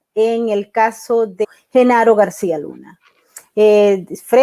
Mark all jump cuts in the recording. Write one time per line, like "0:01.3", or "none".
0:01.5